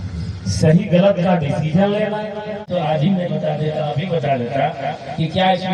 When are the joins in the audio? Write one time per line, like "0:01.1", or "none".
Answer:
0:02.7